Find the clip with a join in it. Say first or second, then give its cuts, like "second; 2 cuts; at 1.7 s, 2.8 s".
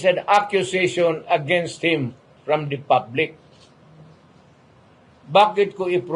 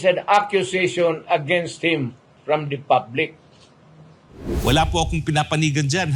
second; 1 cut; at 4.6 s